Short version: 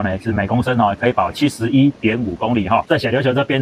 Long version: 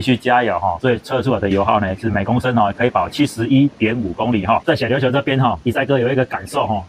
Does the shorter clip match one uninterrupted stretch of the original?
yes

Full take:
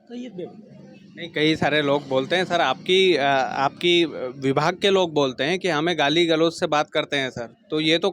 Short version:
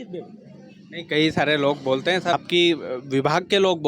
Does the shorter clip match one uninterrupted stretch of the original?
no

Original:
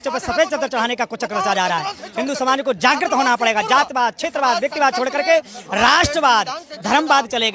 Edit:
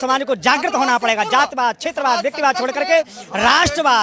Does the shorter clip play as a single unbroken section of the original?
yes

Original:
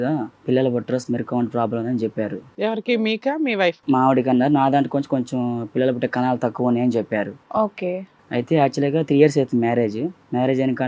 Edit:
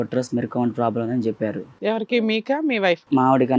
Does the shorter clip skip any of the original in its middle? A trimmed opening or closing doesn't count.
no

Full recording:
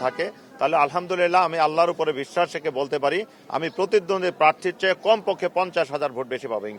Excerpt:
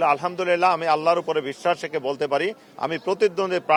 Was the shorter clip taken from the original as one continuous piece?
yes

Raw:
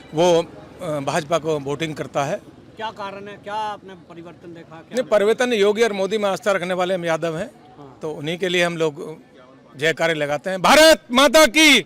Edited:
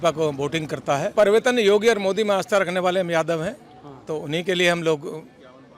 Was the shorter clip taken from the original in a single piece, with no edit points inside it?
no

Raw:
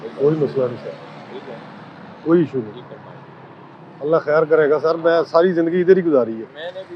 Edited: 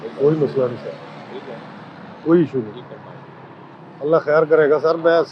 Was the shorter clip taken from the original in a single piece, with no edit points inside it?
yes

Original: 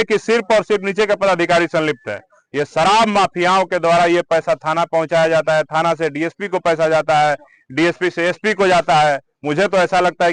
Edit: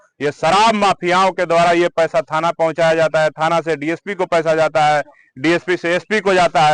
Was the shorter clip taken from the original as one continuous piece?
yes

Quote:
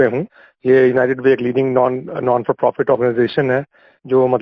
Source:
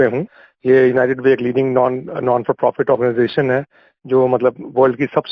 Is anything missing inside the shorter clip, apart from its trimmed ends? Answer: no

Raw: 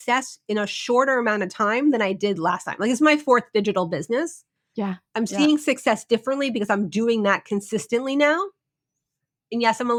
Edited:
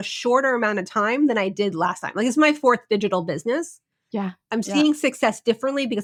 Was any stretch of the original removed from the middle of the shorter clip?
no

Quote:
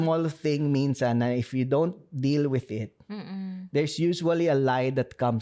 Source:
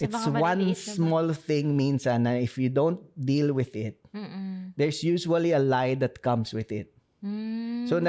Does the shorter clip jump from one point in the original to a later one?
no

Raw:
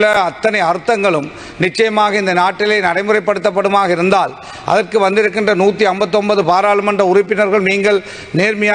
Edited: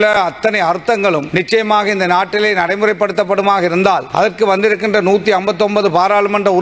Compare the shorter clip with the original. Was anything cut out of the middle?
yes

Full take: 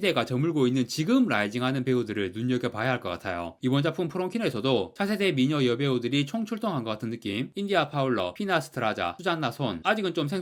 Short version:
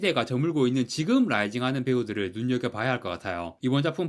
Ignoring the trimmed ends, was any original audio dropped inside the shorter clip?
no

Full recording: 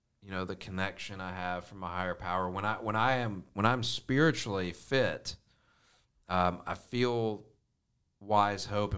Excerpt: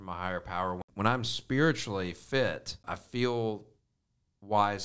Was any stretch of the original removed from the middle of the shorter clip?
yes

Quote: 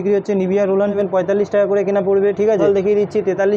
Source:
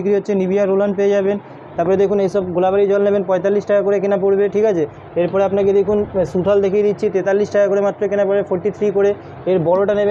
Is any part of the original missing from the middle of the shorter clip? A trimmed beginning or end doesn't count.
yes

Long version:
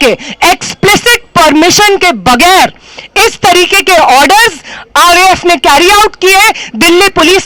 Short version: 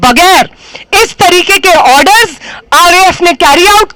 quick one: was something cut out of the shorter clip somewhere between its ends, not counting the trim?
no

